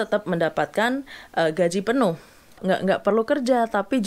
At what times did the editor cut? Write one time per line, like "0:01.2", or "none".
0:02.6